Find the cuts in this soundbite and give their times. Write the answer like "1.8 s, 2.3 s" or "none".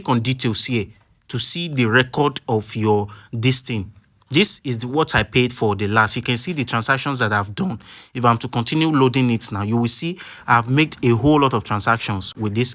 none